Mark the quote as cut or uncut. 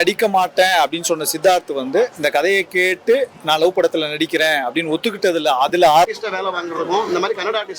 cut